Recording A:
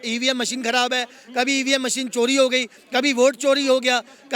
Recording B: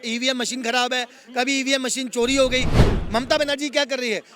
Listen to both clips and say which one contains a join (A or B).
B